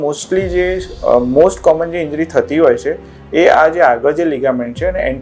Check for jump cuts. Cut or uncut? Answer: uncut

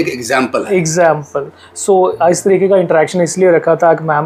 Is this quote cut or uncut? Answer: uncut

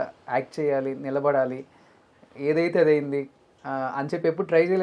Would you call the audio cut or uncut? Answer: uncut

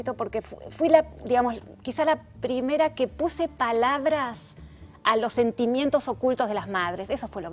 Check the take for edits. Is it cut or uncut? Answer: uncut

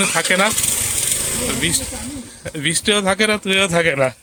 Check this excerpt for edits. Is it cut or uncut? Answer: uncut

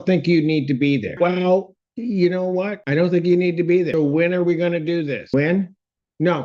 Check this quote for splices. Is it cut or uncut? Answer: cut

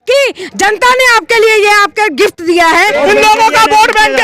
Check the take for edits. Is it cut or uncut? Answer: cut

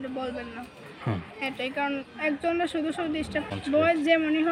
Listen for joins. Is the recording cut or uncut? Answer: cut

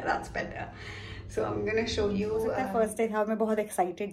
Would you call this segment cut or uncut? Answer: cut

